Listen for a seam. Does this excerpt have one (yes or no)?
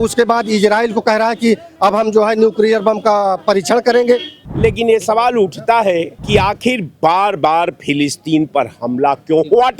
yes